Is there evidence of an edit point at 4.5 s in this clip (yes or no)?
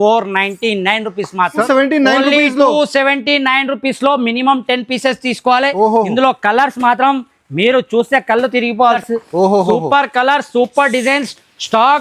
no